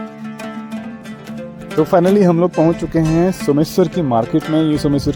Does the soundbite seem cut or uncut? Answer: cut